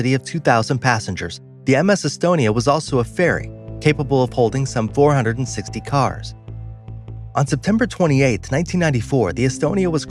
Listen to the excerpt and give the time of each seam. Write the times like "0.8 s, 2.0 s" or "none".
5.4 s